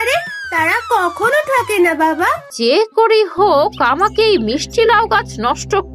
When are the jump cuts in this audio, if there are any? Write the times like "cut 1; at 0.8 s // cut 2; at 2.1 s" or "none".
cut 1; at 2.5 s